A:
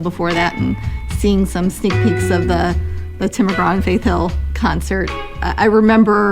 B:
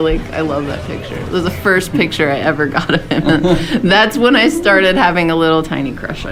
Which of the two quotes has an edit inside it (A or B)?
A